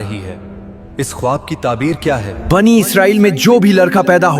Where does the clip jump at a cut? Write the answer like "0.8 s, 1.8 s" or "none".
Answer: 2.3 s